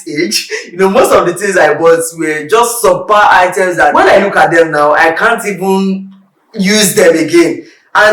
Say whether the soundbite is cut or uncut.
cut